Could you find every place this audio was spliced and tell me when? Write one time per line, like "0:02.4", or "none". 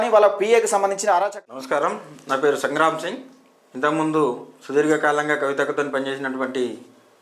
0:01.1